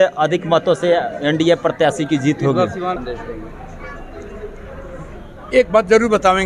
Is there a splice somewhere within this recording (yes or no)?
yes